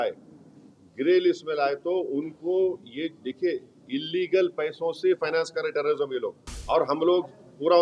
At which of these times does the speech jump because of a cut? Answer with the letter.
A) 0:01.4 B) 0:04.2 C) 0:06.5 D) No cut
C